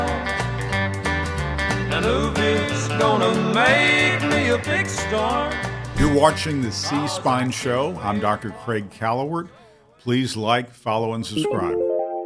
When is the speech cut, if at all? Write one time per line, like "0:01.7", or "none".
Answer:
0:06.0
0:11.3